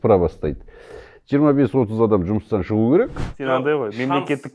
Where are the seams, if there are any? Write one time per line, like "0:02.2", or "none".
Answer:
0:03.3